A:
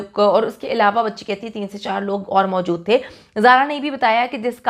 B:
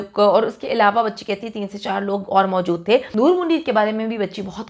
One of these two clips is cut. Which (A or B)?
B